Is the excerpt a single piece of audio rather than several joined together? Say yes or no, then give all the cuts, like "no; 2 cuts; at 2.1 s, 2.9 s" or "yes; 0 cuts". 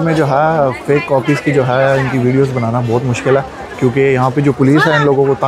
yes; 0 cuts